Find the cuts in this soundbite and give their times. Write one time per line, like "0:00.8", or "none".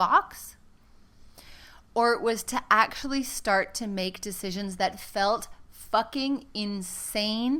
none